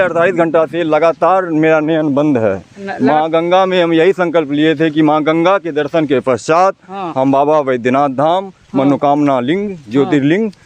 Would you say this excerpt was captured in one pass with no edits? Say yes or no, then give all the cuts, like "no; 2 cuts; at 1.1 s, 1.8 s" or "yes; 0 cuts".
yes; 0 cuts